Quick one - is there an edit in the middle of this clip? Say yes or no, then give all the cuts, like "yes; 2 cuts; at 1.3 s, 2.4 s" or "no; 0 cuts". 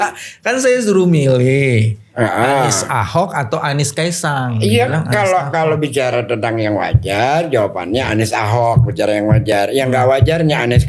no; 0 cuts